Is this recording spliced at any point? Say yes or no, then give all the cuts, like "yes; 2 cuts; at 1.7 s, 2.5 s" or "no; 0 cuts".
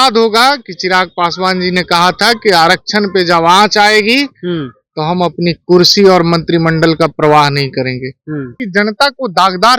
yes; 1 cut; at 8.6 s